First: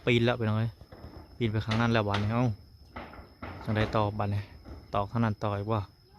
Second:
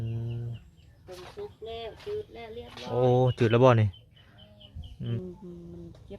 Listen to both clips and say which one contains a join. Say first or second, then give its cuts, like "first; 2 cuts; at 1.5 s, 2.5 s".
second; 1 cut; at 5.2 s